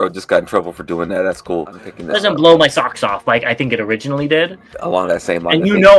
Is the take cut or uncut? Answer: cut